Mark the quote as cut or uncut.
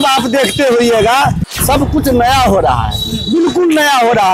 cut